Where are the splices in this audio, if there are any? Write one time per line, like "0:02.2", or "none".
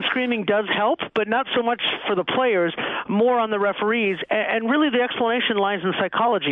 none